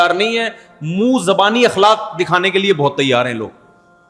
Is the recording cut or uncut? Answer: uncut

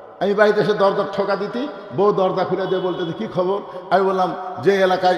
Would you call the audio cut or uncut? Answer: uncut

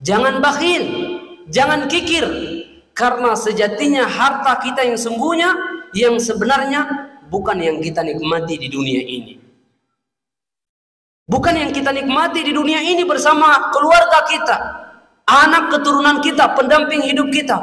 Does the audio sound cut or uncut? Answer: uncut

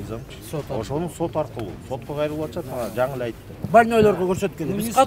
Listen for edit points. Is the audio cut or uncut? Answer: cut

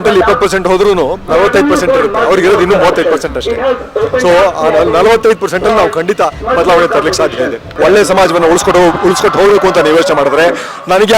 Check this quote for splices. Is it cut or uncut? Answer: cut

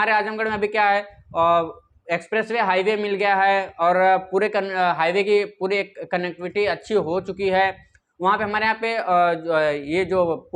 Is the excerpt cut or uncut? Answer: uncut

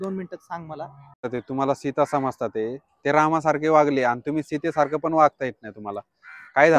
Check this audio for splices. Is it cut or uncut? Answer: cut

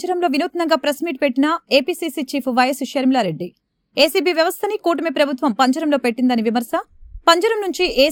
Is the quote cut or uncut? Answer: uncut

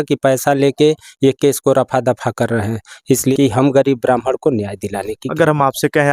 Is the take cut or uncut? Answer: cut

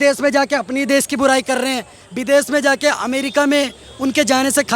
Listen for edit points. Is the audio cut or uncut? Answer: cut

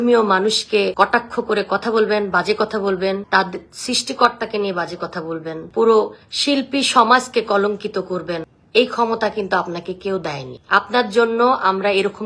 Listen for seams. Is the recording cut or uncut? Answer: cut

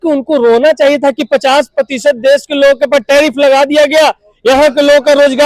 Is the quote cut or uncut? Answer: uncut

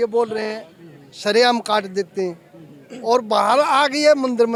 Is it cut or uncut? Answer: uncut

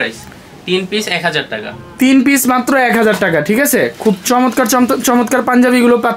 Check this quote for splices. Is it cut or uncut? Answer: uncut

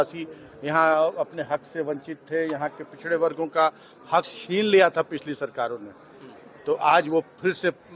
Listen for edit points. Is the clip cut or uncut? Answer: uncut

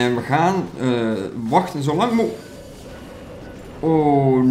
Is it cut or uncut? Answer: uncut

